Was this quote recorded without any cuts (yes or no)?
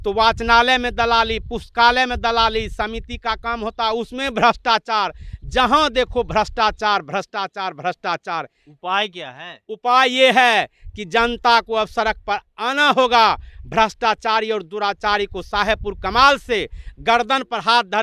yes